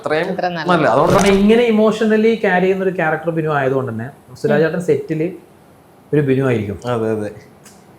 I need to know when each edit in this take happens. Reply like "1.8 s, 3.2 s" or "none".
1.2 s